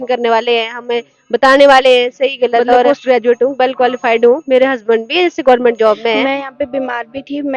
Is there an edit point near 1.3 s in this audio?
no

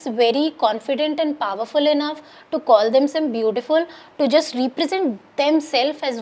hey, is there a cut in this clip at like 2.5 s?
no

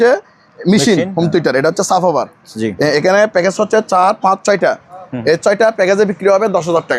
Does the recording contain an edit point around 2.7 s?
no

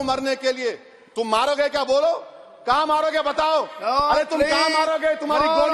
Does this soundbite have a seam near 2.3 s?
no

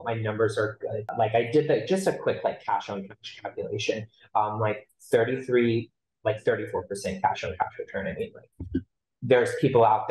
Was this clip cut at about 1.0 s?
yes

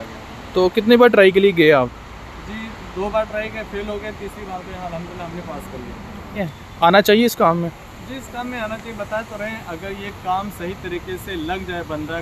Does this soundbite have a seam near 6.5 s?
yes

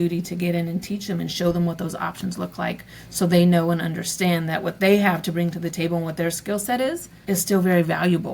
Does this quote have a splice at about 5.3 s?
no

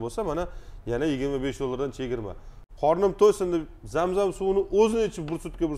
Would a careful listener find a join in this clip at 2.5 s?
yes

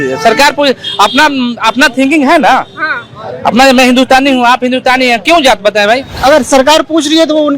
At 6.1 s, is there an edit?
yes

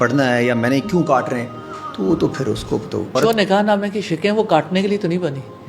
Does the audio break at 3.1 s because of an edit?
yes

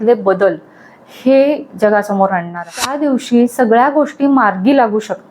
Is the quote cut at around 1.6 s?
no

